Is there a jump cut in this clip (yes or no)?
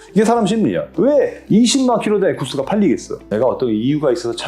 yes